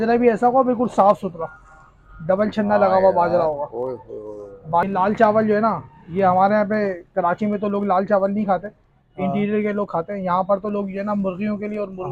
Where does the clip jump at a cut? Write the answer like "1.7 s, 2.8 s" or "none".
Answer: 4.8 s